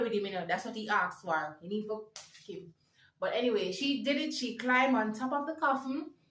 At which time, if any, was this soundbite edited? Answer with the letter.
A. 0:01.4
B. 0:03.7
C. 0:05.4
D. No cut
D